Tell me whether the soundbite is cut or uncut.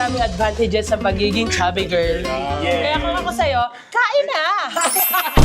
uncut